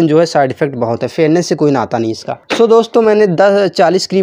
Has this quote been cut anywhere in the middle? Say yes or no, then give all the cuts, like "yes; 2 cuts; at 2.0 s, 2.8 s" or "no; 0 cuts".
yes; 1 cut; at 2.3 s